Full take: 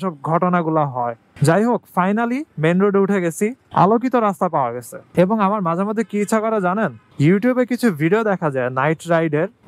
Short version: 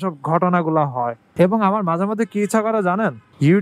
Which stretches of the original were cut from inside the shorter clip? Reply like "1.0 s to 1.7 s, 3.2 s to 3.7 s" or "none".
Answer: 1.2 s to 5.0 s